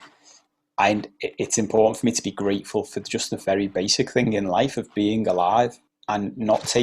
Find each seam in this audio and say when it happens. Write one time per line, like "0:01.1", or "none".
0:05.9